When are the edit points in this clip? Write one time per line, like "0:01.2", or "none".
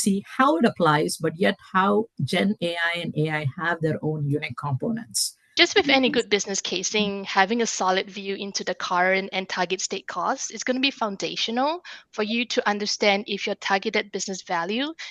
0:05.5